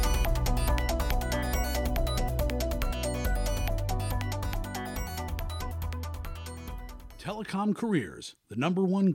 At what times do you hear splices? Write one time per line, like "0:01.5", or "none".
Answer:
0:07.1